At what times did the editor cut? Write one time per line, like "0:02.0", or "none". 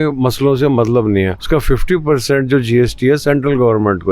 0:01.4